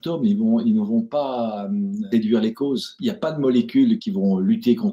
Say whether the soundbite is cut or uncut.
cut